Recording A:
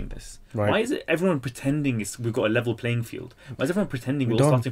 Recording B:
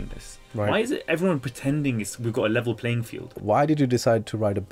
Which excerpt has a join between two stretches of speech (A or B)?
B